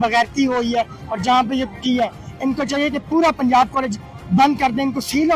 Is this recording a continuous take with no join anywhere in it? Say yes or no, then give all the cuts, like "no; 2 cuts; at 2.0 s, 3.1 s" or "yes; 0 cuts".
yes; 0 cuts